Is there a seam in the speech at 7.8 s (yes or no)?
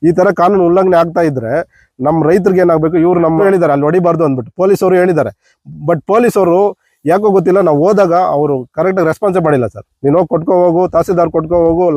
no